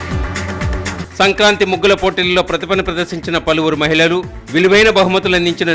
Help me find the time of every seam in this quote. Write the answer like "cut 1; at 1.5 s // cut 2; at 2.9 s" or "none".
none